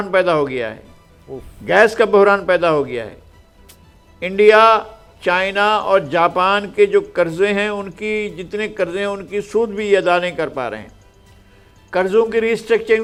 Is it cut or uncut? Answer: uncut